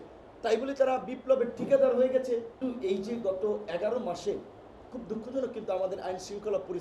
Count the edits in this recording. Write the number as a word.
one